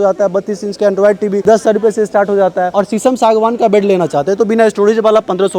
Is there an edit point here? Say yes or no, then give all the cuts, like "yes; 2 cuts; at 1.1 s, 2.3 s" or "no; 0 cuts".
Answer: yes; 1 cut; at 2.7 s